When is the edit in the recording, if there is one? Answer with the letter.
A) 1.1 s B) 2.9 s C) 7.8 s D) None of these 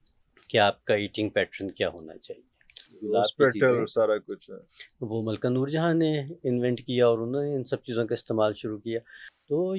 B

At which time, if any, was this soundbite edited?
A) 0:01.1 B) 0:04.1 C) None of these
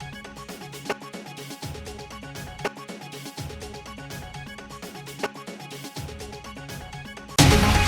C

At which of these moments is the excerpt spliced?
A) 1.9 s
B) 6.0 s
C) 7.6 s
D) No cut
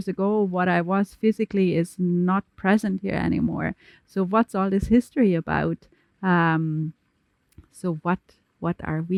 D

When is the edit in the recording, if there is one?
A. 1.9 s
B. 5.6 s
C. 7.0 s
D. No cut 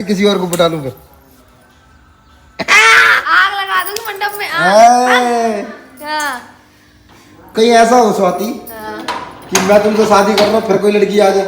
D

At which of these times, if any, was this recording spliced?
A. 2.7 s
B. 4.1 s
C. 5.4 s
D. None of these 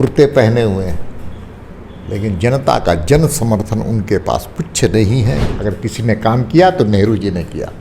C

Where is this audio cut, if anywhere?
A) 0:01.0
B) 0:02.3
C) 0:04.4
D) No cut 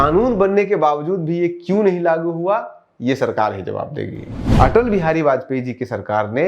C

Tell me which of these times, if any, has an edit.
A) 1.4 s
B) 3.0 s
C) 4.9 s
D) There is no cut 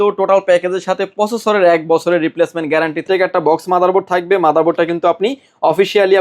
B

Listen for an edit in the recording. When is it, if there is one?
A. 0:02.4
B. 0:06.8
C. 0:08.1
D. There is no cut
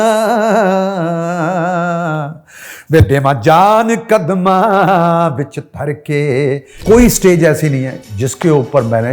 B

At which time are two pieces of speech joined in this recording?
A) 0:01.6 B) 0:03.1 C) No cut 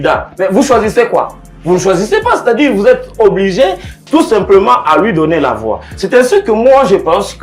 C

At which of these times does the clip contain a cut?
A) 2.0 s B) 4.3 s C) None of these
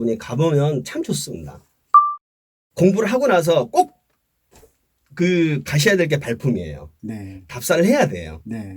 A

